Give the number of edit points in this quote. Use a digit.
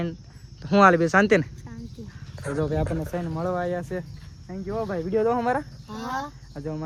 0